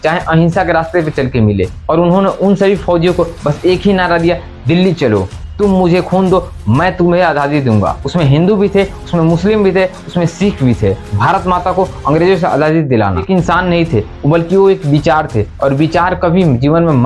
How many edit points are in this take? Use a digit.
5